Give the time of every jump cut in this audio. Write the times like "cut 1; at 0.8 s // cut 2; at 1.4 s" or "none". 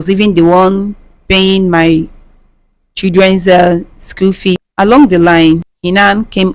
cut 1; at 4.7 s // cut 2; at 5.7 s